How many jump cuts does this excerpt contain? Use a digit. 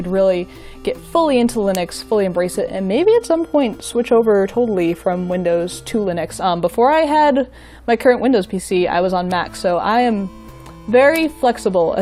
1